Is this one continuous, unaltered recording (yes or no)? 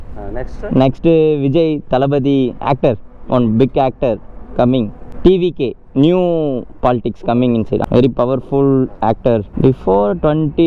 no